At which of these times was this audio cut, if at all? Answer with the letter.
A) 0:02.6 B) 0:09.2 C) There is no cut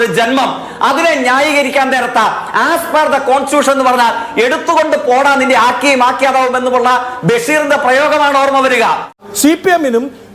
B